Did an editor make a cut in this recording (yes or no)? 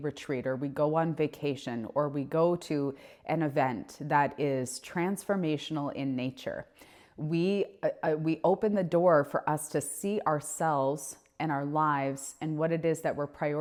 no